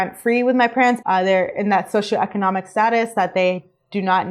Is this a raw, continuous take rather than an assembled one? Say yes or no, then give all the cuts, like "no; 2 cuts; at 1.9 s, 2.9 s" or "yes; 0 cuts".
no; 1 cut; at 1.0 s